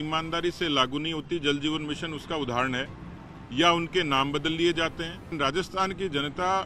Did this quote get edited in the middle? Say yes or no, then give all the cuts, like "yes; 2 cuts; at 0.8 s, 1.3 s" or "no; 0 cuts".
yes; 1 cut; at 5.4 s